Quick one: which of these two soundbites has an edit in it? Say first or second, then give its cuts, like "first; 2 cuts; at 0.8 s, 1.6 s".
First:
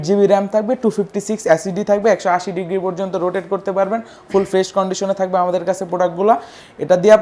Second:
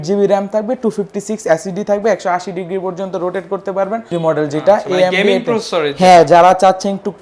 second; 1 cut; at 4.2 s